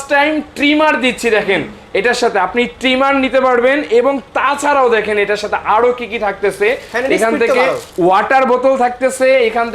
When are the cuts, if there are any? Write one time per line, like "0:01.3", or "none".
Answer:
none

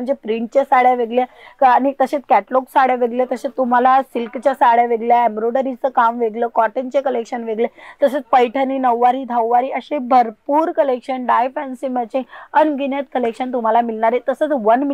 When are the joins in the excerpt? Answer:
none

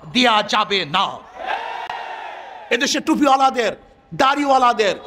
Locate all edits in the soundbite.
none

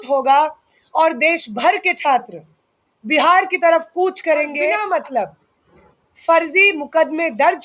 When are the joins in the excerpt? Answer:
0:04.8

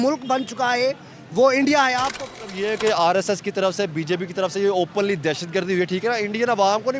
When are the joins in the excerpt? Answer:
0:02.3

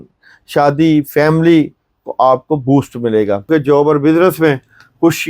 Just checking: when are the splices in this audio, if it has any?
0:03.5

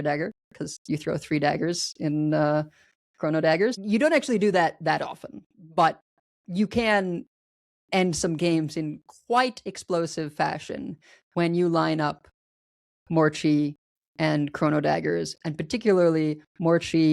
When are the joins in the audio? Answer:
0:03.8

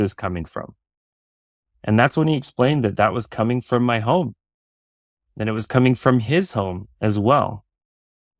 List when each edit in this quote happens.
none

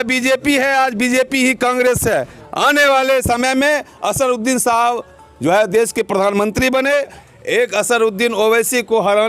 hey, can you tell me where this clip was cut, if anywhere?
0:02.3
0:07.2

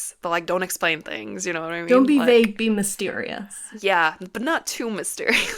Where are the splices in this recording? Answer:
0:03.6

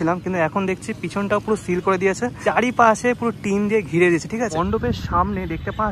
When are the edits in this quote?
0:02.4
0:04.6

